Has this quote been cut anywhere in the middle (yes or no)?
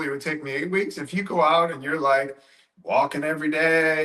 no